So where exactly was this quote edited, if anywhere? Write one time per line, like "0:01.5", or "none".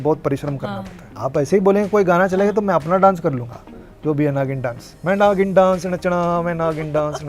0:01.1
0:04.9